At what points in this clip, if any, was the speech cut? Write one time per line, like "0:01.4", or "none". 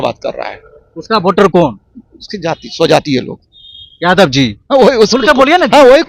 none